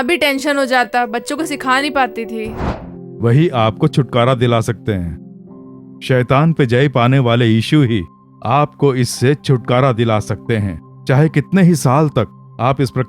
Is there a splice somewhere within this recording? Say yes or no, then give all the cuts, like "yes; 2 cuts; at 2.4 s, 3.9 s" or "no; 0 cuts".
yes; 1 cut; at 2.6 s